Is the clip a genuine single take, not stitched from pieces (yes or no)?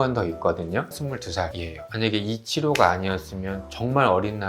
no